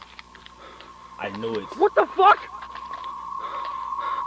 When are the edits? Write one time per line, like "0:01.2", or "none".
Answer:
none